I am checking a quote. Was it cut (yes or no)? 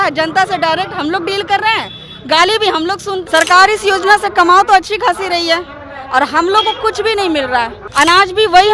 yes